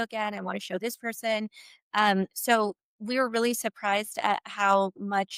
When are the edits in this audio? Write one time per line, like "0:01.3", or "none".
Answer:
none